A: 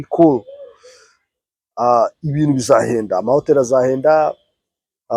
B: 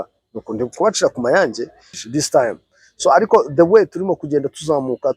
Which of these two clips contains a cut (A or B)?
B